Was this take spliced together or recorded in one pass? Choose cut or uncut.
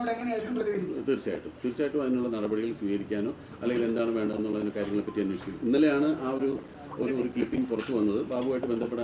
uncut